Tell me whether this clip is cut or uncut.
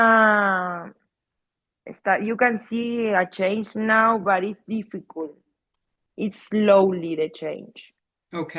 uncut